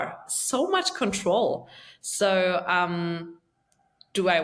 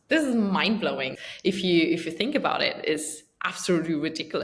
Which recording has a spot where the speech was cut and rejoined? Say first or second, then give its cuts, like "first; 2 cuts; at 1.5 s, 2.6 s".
second; 1 cut; at 1.2 s